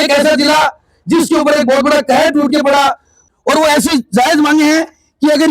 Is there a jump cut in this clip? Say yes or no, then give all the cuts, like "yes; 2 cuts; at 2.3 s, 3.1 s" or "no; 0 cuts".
yes; 1 cut; at 3.1 s